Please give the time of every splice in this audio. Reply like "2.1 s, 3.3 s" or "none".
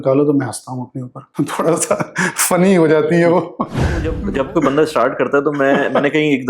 1.3 s, 4.2 s